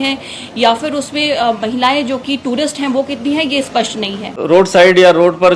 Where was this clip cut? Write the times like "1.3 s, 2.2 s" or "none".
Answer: 4.4 s